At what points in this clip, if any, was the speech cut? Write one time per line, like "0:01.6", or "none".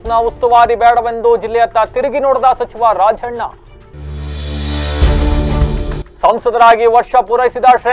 none